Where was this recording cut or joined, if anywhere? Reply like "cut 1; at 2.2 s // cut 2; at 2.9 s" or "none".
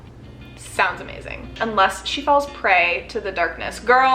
cut 1; at 1.6 s